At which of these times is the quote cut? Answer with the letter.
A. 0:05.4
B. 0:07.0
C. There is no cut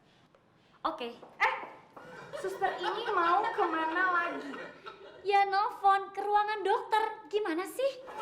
C